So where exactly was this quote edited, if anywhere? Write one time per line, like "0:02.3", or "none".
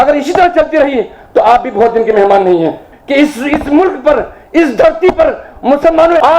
0:02.8